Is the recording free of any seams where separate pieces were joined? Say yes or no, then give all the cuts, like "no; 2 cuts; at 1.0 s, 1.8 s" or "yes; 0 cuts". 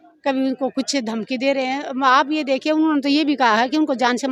yes; 0 cuts